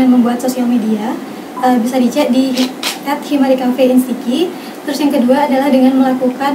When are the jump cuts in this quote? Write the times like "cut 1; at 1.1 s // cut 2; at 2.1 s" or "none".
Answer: none